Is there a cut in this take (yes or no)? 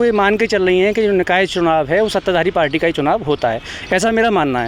no